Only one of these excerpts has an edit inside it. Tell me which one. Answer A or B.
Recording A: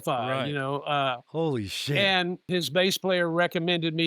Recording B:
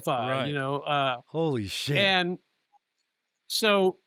A